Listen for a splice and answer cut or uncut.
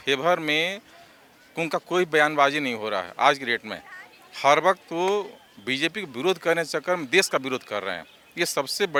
uncut